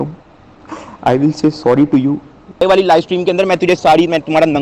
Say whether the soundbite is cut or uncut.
cut